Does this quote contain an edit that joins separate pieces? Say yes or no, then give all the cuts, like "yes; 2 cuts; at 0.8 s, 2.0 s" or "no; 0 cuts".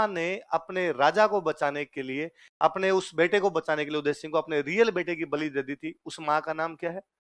no; 0 cuts